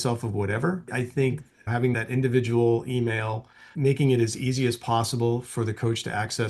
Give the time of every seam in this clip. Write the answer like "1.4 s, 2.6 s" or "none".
3.7 s